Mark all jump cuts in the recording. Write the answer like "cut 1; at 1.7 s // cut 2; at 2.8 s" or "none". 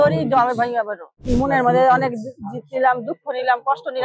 cut 1; at 1.2 s